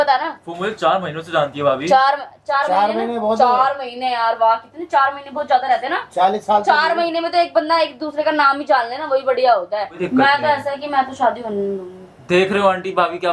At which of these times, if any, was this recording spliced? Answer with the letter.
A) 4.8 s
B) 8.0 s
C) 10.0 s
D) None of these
C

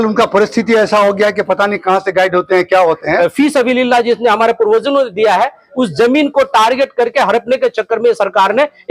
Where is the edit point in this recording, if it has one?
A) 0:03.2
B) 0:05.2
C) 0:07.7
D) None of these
A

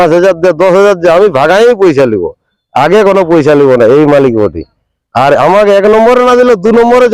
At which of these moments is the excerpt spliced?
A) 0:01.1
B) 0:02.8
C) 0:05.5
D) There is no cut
D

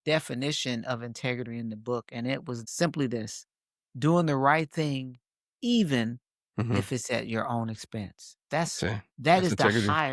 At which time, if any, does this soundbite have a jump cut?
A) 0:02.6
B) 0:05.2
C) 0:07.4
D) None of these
A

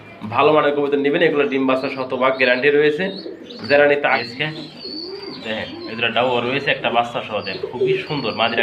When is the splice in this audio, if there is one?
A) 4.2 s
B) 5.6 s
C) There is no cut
A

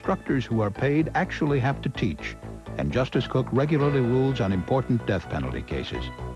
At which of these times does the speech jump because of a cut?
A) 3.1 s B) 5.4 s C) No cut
C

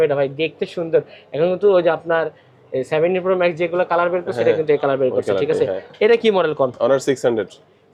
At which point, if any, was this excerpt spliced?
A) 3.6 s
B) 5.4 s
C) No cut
C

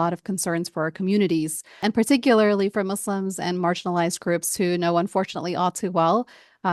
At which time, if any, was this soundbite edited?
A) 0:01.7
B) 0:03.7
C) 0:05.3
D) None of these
A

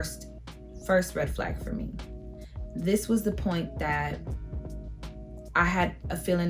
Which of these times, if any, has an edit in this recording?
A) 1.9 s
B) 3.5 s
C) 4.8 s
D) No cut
D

